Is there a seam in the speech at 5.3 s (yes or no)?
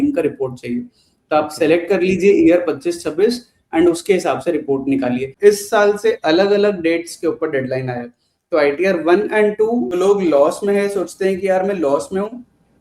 yes